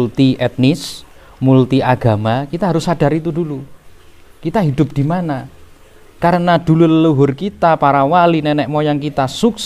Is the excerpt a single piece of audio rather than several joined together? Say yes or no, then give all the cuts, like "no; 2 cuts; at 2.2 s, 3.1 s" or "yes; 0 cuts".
yes; 0 cuts